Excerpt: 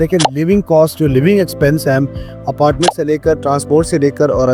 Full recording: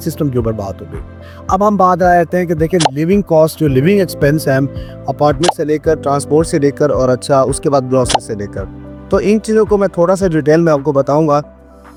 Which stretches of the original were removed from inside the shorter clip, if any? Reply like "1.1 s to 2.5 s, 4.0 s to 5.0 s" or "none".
none